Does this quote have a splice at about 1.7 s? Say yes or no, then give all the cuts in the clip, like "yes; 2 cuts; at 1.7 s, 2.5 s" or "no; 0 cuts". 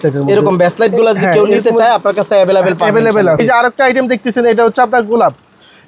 no; 1 cut; at 3.4 s